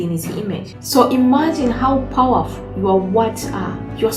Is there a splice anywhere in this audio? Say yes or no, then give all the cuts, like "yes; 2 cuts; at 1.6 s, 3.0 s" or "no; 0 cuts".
no; 0 cuts